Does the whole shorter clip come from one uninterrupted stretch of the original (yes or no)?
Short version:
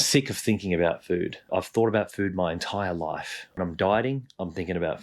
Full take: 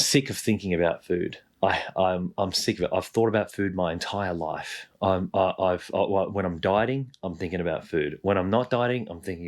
no